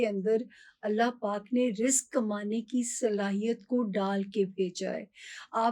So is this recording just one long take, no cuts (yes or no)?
yes